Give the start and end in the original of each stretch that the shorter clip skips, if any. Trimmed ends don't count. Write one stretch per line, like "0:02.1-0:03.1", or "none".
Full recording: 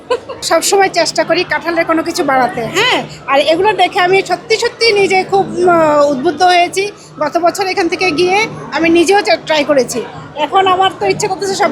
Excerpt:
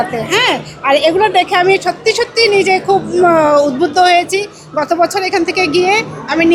none